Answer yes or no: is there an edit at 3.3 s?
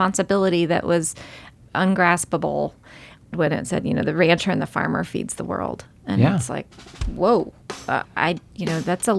yes